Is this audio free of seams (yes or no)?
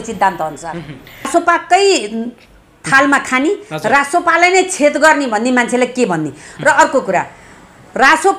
no